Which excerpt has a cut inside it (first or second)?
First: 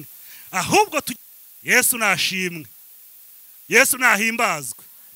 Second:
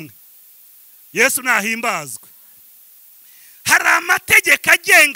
first